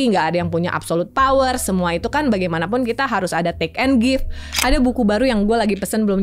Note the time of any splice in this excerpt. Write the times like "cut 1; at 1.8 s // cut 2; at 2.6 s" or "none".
cut 1; at 4.5 s